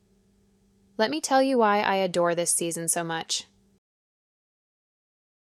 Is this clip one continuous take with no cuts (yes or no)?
yes